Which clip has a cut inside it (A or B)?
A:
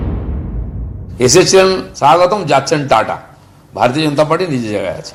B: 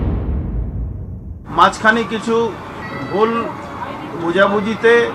B